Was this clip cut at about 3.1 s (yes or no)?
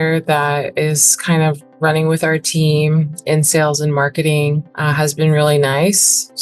no